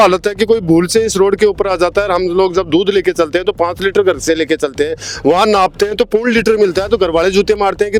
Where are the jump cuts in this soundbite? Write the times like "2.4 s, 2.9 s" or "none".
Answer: none